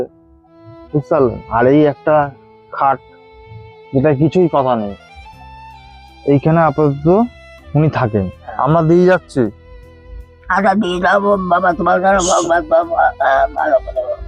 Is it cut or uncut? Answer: cut